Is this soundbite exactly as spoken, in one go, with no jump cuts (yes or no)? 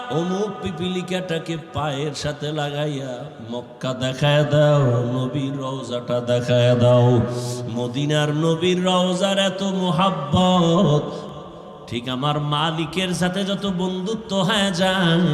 no